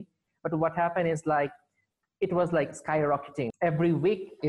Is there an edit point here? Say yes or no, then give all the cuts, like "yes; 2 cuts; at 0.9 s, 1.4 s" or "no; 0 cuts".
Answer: yes; 1 cut; at 3.5 s